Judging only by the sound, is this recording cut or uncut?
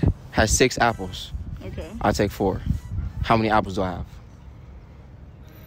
uncut